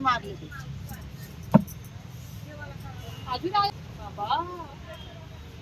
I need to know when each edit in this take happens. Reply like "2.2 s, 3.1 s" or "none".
3.7 s